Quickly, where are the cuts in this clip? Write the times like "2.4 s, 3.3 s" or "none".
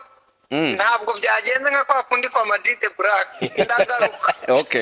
3.4 s